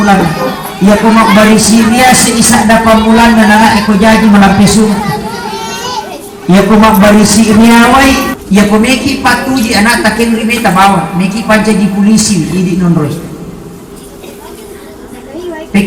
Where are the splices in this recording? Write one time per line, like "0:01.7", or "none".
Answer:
0:08.3